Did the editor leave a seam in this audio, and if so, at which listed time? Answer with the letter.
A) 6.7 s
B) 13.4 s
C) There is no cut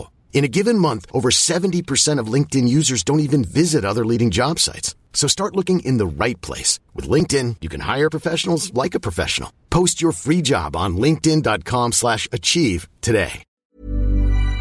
B